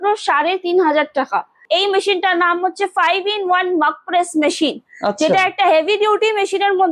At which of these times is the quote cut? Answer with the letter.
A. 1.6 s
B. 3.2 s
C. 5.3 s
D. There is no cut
A